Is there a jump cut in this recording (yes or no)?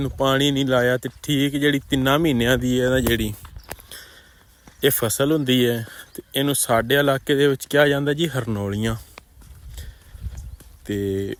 no